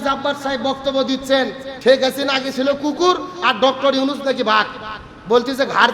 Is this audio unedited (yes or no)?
no